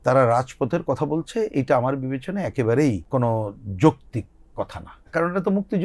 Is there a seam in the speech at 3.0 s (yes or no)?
yes